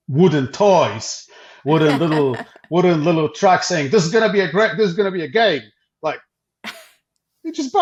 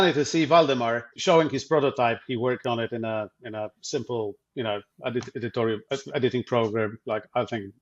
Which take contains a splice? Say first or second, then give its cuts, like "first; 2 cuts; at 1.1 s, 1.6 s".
second; 1 cut; at 1.1 s